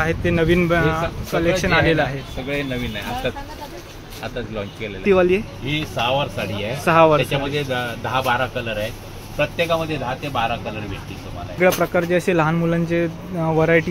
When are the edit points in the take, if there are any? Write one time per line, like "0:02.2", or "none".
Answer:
0:05.0
0:11.6